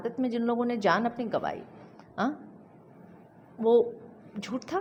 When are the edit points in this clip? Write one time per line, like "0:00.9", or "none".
none